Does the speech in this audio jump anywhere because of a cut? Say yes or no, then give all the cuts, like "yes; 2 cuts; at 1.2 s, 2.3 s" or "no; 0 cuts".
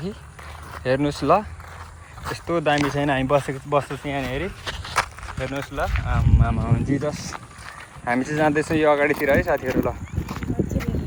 no; 0 cuts